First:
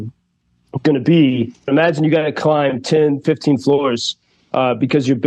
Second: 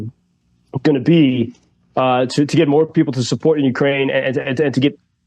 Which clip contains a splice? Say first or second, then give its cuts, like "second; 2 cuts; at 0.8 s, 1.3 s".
first; 1 cut; at 1.7 s